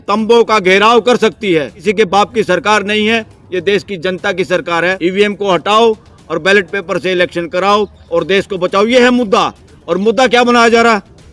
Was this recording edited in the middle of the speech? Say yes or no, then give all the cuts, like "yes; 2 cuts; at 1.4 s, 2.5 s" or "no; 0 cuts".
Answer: yes; 2 cuts; at 1.8 s, 5.0 s